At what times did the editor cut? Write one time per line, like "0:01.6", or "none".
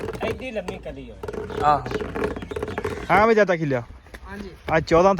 0:02.9